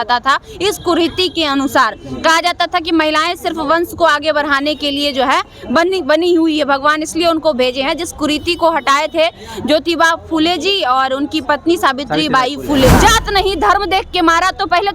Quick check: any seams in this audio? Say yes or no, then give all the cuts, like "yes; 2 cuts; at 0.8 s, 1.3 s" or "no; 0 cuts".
yes; 1 cut; at 12.9 s